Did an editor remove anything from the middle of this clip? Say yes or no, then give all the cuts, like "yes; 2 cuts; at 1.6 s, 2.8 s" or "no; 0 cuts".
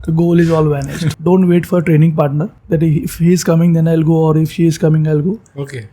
yes; 2 cuts; at 1.1 s, 2.5 s